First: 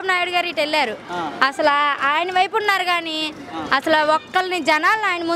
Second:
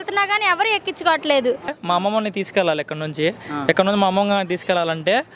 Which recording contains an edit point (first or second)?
second